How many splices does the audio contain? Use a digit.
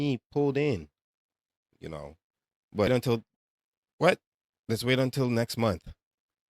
1